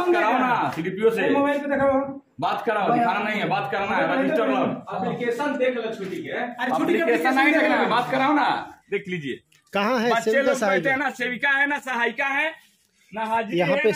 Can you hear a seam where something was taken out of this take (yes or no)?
yes